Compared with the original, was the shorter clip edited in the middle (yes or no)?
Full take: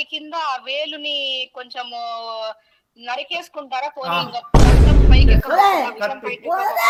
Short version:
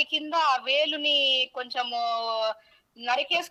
no